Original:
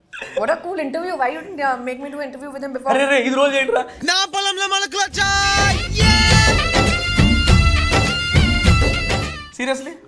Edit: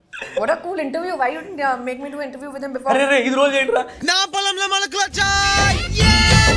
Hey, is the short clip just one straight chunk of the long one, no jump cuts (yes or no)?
yes